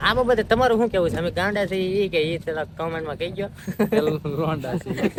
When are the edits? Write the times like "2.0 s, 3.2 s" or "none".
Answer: none